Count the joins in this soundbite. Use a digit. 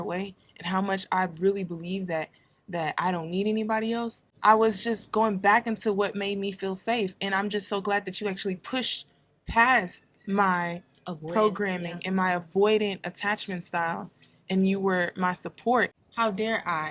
2